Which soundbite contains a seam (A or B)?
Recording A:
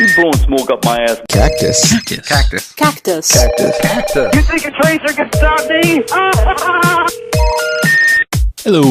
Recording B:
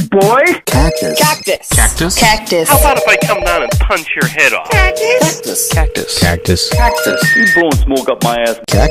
A